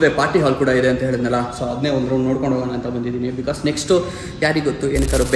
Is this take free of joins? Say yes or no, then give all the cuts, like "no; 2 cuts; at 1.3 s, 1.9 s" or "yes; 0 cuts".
yes; 0 cuts